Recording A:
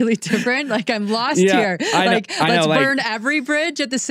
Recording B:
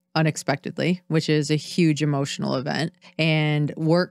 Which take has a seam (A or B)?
B